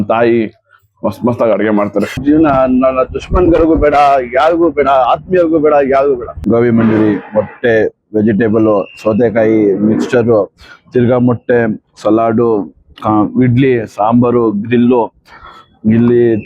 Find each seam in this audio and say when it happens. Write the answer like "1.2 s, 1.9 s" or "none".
2.2 s, 6.3 s